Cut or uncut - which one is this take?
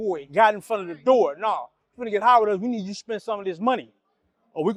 uncut